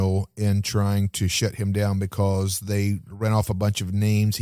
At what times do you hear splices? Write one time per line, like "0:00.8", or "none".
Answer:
none